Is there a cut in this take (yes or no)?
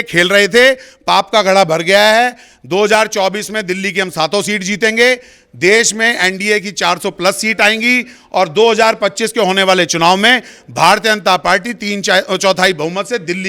no